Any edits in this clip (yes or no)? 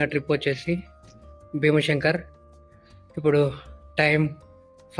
no